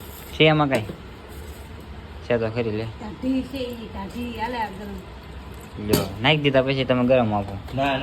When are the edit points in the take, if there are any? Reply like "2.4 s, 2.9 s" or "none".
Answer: none

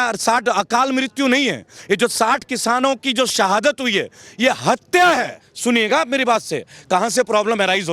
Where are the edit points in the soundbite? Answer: 5.4 s

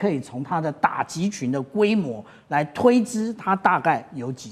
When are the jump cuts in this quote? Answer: none

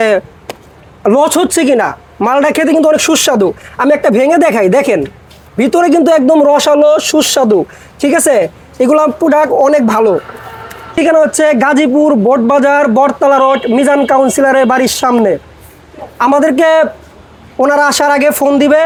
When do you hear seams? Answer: none

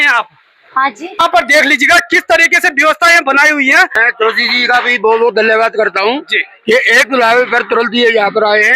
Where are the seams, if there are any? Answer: 1.2 s, 3.9 s

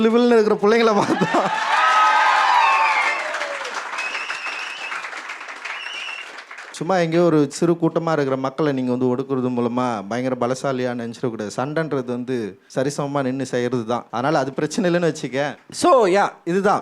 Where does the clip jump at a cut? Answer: 6.7 s, 12.6 s, 14.1 s, 15.6 s

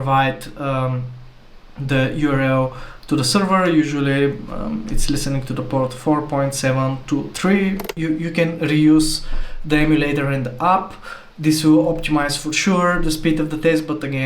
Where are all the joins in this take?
7.9 s

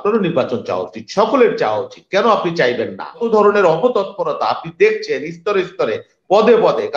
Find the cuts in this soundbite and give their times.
3.2 s

